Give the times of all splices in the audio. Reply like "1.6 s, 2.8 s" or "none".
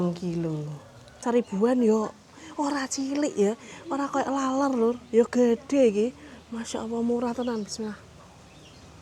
1.0 s